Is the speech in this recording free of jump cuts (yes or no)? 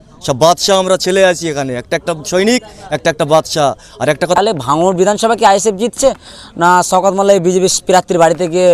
no